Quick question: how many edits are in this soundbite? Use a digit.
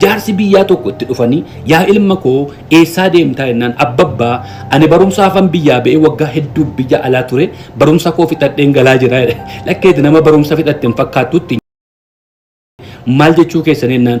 0